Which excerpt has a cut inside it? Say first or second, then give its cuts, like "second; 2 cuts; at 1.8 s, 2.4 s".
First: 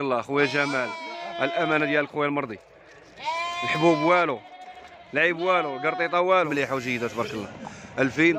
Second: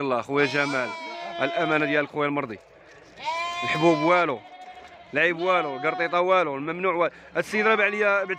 first; 1 cut; at 6.5 s